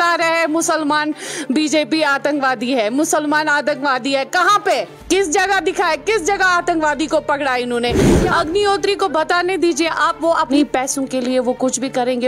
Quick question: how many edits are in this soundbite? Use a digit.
3